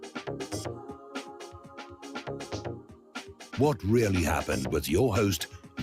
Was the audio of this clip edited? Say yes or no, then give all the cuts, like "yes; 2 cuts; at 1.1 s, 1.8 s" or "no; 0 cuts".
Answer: no; 0 cuts